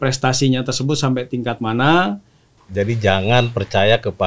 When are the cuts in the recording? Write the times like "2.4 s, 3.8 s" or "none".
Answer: 2.6 s